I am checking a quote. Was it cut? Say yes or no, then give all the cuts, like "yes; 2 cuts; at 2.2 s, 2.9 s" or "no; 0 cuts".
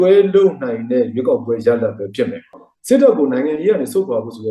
yes; 1 cut; at 2.6 s